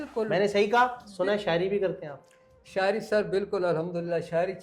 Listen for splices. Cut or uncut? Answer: cut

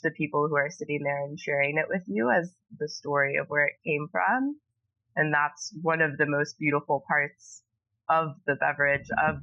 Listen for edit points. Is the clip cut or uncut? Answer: uncut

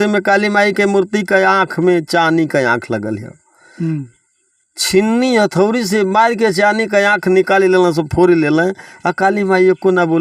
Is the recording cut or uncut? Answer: uncut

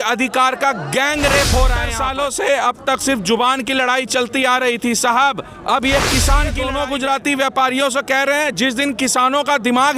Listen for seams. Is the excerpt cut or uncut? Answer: cut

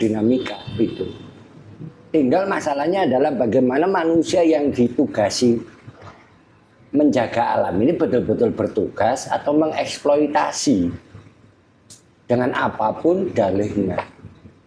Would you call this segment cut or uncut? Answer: uncut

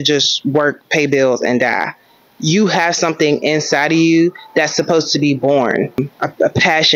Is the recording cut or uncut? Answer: cut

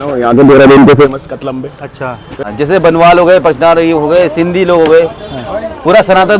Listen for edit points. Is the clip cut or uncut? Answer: cut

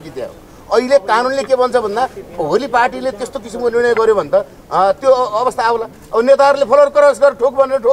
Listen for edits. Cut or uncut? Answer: uncut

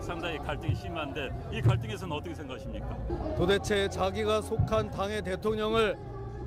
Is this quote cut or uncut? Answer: uncut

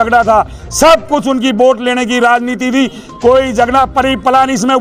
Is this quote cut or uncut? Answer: uncut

